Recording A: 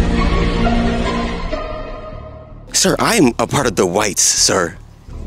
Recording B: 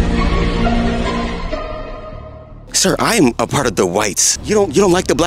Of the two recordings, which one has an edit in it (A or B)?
B